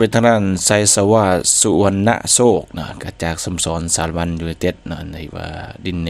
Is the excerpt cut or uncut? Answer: uncut